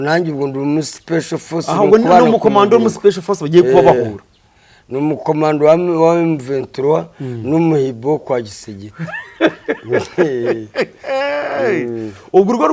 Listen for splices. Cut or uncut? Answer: uncut